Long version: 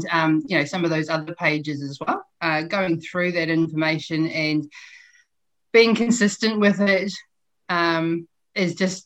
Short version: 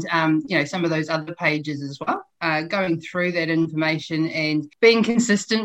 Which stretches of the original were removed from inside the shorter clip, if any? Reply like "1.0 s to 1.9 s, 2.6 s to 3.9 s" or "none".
4.7 s to 5.6 s

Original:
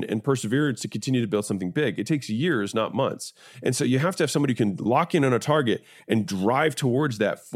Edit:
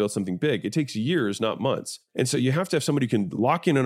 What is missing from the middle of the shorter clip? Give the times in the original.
3.3 s to 3.4 s

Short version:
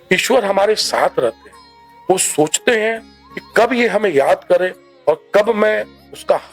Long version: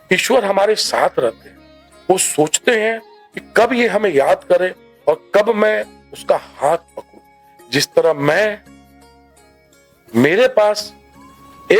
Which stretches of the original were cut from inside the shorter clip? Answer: none

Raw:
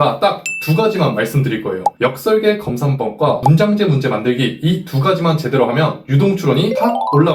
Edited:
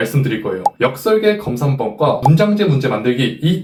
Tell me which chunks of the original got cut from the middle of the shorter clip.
none

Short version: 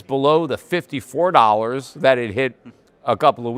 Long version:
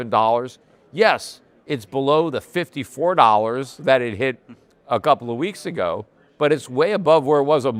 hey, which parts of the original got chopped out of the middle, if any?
none

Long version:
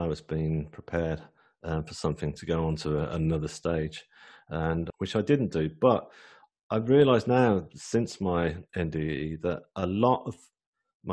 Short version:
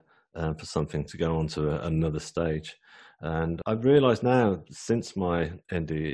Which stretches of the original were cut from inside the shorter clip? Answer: 4.9 s to 6.6 s

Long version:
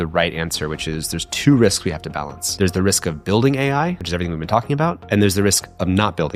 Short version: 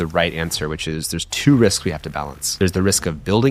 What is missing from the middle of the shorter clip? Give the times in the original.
none

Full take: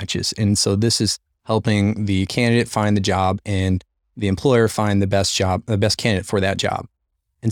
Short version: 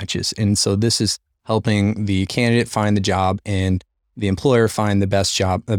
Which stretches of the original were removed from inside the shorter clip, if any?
none

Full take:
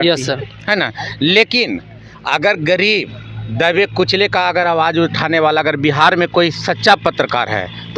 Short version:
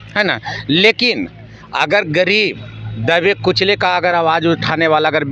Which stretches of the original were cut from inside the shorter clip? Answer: none

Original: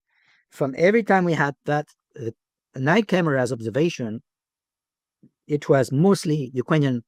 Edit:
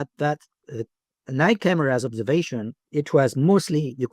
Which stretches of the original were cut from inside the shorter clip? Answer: 4.2 s to 5.3 s

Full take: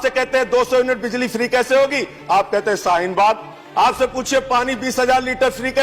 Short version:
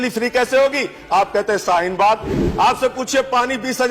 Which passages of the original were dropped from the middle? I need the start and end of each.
none

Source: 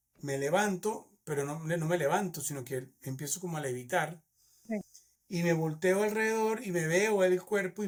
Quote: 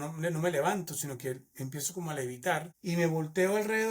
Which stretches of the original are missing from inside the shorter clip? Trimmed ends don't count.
4.2 s to 5.2 s

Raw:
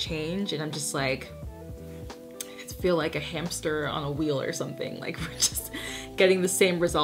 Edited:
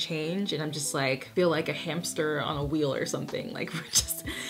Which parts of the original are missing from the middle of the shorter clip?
1.3 s to 2.7 s

